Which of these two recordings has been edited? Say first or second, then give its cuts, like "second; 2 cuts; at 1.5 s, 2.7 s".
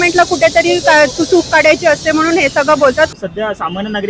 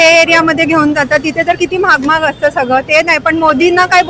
first; 1 cut; at 3.1 s